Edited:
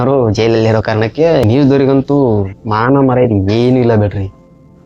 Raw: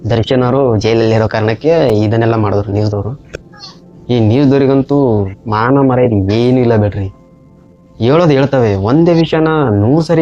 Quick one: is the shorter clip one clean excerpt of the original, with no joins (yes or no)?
no